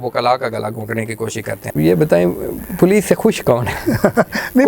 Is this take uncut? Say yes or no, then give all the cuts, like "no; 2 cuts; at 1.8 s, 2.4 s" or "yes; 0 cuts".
no; 1 cut; at 1.6 s